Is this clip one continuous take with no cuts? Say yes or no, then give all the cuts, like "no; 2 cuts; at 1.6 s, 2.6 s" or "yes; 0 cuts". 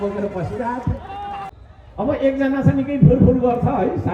no; 1 cut; at 1.6 s